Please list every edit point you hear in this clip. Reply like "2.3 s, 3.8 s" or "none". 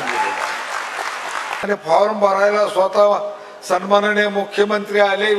1.6 s